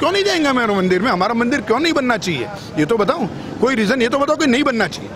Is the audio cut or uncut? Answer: uncut